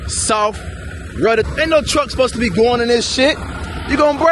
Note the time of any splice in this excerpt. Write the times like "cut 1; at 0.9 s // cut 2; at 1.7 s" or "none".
cut 1; at 1.5 s